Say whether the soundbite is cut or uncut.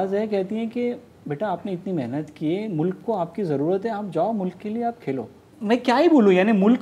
cut